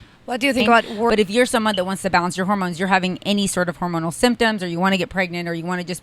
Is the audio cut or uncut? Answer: cut